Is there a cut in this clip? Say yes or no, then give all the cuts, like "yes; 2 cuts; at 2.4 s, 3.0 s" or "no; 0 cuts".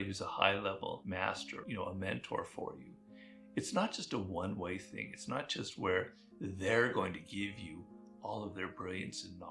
yes; 1 cut; at 1.4 s